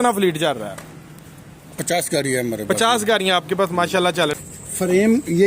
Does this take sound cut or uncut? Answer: cut